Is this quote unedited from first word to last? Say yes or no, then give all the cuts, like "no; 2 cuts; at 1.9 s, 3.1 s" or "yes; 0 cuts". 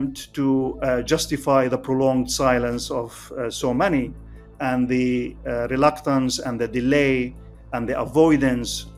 yes; 0 cuts